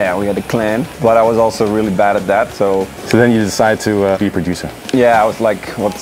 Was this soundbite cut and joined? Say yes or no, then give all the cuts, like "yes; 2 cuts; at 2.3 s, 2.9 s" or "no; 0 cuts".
yes; 3 cuts; at 0.9 s, 3.0 s, 4.2 s